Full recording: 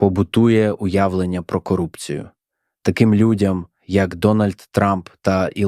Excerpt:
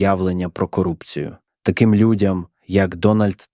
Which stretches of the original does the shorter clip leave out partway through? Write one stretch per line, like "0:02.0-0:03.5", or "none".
0:02.4-0:02.6